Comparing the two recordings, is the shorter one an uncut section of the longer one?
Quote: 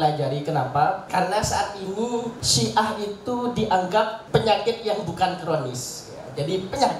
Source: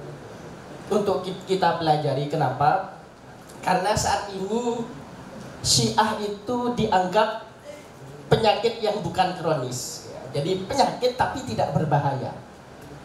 no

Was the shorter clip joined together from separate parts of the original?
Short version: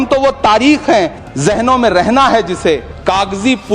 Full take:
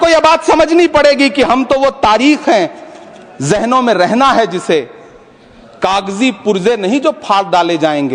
yes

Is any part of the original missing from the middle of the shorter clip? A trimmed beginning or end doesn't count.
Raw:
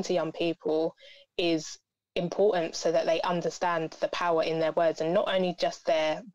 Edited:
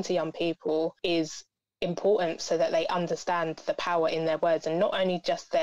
yes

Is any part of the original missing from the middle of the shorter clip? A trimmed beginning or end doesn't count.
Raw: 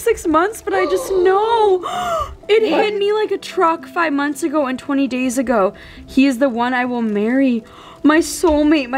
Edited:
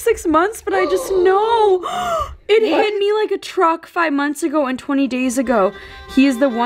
no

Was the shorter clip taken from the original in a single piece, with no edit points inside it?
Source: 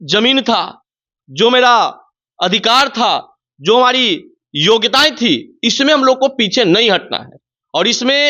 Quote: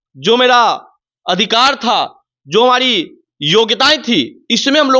yes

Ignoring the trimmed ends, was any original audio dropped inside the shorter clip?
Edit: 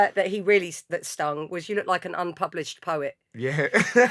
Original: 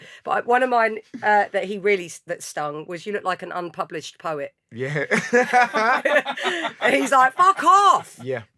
no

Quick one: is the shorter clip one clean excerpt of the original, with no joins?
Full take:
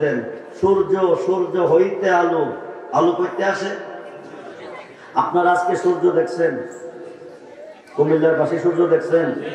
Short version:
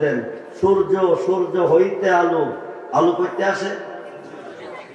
yes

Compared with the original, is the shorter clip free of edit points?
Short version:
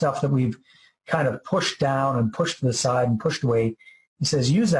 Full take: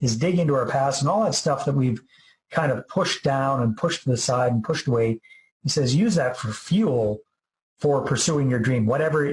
yes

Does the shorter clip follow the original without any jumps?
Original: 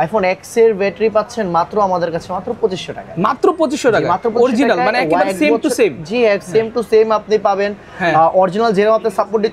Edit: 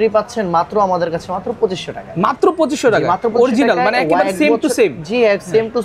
yes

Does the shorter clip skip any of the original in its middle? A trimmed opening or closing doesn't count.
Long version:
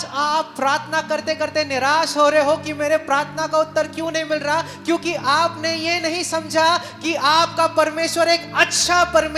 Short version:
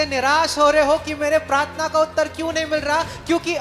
no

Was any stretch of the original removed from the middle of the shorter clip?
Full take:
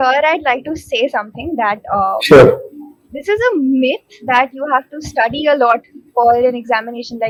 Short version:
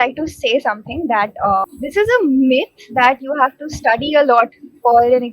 yes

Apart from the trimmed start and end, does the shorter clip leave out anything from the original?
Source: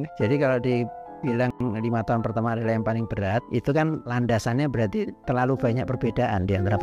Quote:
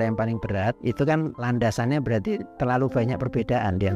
no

